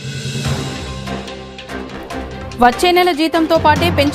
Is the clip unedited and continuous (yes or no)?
no